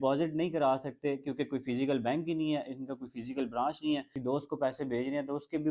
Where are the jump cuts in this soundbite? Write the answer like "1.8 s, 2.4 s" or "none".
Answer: 4.1 s